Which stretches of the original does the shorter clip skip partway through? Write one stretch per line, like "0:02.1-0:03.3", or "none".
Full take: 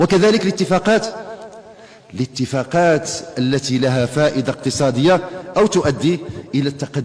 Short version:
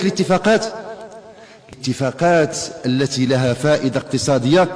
0:02.2-0:02.3